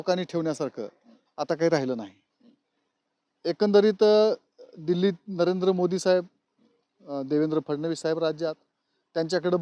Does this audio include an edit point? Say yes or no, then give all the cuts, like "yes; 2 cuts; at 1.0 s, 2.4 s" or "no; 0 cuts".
no; 0 cuts